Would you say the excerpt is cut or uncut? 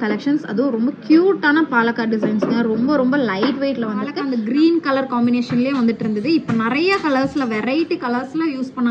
cut